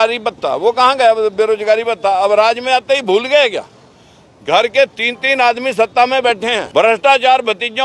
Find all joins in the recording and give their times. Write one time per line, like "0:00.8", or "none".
0:06.6